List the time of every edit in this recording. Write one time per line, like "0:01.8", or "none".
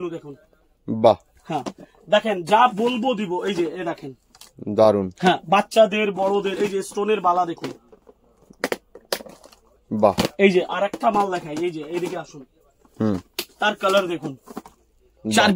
none